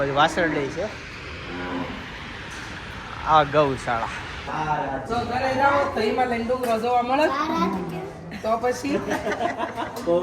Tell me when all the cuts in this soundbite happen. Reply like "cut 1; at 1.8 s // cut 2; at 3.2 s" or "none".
cut 1; at 4.5 s